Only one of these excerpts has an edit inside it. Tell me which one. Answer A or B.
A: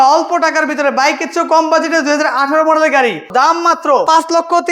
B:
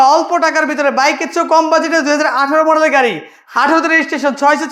A